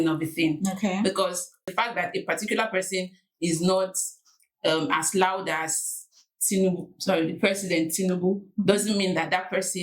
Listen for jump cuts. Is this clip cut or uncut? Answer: cut